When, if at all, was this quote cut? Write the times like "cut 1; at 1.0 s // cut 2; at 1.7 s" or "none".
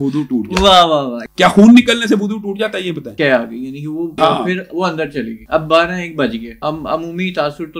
cut 1; at 1.2 s // cut 2; at 3.1 s // cut 3; at 4.1 s // cut 4; at 5.4 s // cut 5; at 6.5 s